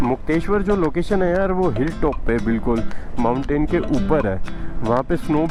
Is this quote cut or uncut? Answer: uncut